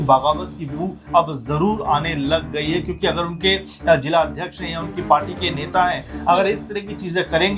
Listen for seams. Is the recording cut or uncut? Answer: uncut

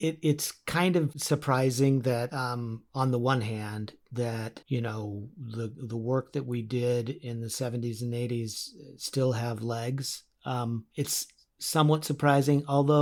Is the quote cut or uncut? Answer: cut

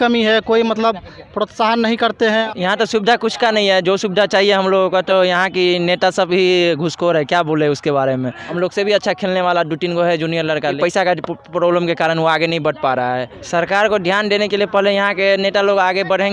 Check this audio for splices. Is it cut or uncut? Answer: cut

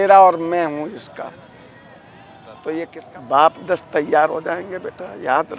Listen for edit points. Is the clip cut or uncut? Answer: cut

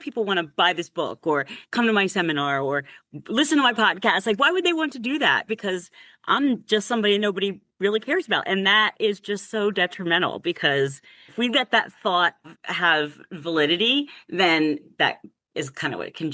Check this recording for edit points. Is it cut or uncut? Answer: cut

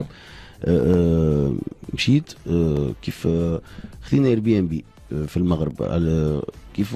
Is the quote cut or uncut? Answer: uncut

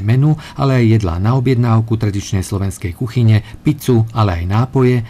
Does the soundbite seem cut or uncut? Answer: uncut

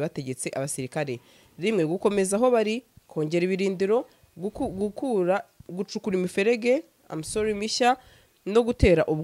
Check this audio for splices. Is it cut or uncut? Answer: uncut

